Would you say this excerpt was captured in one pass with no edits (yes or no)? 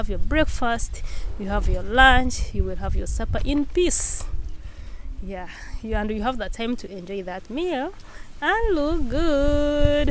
yes